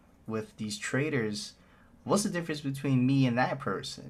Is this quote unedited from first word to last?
yes; 0 cuts

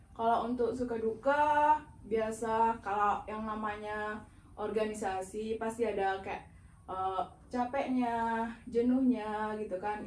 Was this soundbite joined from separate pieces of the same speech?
no; 0 cuts

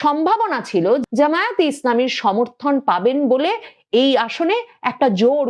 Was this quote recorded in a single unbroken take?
no; 1 cut; at 1.0 s

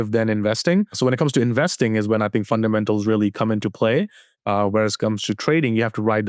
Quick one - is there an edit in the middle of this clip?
no; 0 cuts

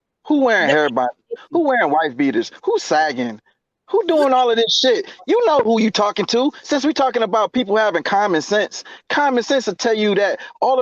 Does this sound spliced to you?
no; 0 cuts

